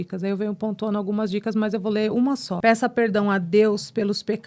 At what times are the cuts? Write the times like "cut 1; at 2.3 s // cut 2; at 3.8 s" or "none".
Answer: cut 1; at 2.5 s